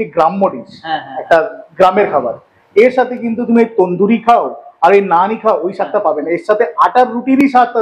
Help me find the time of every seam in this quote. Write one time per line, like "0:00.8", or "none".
none

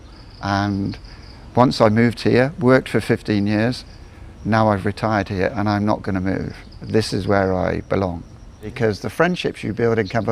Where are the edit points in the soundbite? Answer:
0:08.7

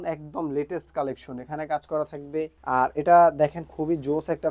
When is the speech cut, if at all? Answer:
0:02.6

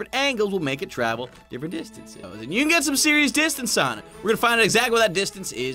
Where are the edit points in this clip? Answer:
0:02.2

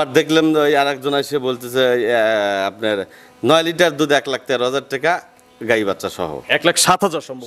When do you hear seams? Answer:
none

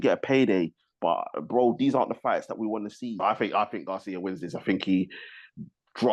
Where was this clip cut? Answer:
0:03.1

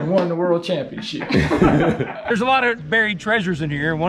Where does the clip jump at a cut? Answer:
0:02.2

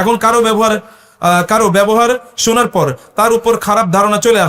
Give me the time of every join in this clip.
none

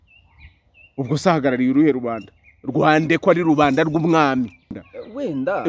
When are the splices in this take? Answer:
0:04.8

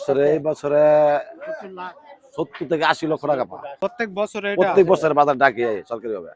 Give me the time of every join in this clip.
0:03.6

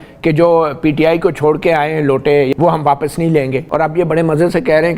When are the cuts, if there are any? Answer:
0:02.5
0:03.6

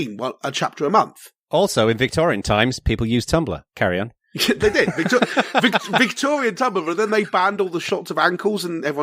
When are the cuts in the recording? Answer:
0:01.5

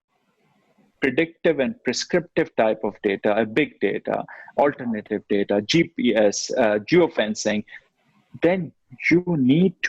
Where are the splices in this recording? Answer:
none

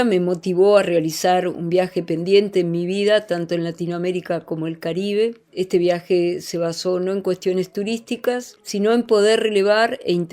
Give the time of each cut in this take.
0:05.5
0:08.6

